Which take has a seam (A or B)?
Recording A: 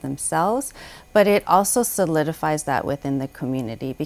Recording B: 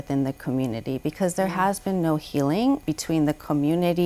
B